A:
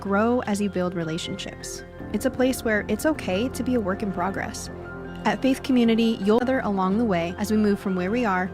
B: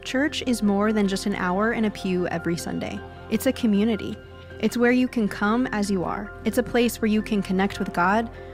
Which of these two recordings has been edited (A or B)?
A